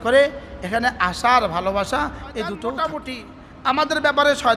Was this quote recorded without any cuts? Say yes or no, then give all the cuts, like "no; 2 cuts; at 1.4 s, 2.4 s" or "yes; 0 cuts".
no; 1 cut; at 2.8 s